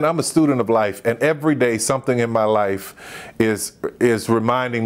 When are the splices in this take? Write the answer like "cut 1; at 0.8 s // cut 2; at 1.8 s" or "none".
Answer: none